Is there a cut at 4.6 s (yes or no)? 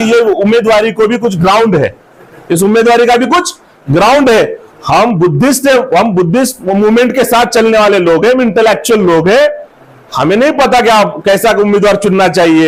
no